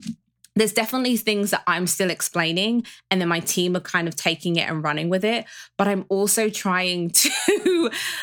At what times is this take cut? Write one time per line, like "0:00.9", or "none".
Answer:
none